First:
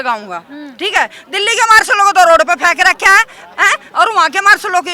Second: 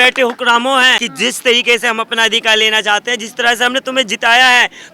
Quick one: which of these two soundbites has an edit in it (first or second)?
second